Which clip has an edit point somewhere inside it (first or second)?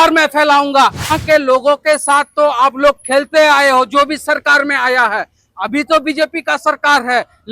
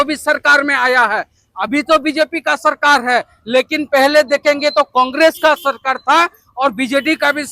first